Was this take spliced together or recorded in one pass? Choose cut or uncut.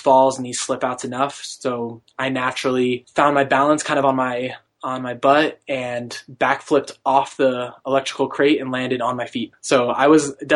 cut